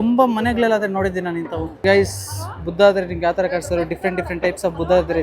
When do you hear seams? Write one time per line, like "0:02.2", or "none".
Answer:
none